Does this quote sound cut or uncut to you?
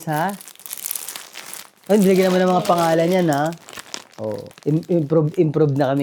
cut